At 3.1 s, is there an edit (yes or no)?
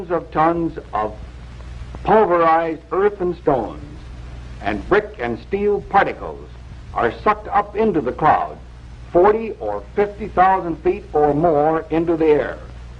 yes